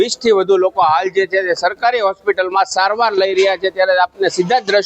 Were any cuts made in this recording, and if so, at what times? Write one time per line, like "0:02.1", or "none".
none